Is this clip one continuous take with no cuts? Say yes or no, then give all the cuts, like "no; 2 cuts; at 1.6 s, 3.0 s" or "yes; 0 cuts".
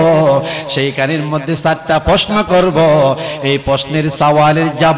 yes; 0 cuts